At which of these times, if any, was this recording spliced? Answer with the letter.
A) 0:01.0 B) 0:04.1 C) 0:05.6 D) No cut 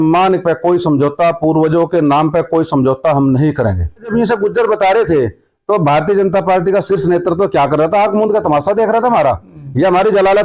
B